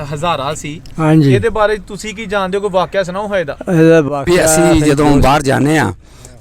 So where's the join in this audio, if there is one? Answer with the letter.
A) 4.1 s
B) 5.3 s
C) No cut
A